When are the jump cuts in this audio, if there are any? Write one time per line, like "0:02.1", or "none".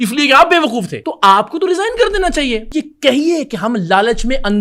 0:01.0
0:02.7